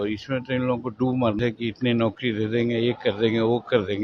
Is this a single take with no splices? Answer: no; 1 cut; at 1.4 s

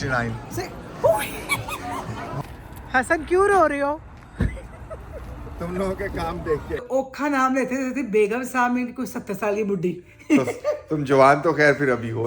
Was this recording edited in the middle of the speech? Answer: yes; 2 cuts; at 2.4 s, 6.8 s

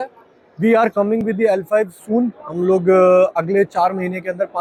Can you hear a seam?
no; 0 cuts

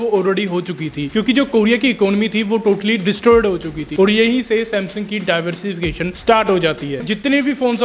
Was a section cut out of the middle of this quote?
yes; 2 cuts; at 3.8 s, 7.0 s

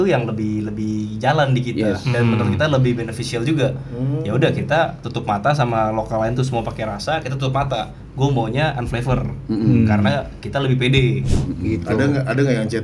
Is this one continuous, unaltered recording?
no; 1 cut; at 11.4 s

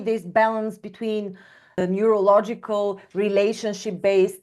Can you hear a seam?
yes; 1 cut; at 1.8 s

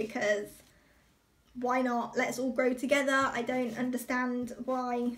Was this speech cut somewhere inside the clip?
no; 0 cuts

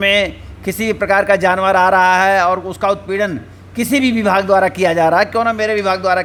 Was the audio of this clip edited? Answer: no; 0 cuts

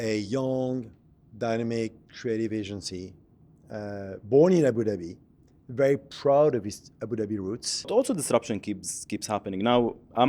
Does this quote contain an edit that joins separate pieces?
yes; 1 cut; at 7.9 s

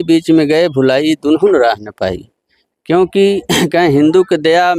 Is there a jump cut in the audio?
no; 0 cuts

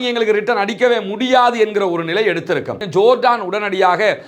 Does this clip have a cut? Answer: yes; 1 cut; at 2.8 s

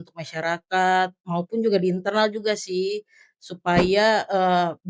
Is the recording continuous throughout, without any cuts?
yes; 0 cuts

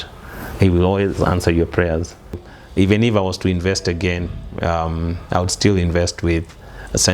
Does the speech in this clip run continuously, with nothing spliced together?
no; 1 cut; at 2.4 s

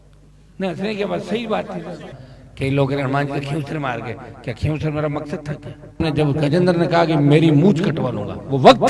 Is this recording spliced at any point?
yes; 2 cuts; at 2.1 s, 6.0 s

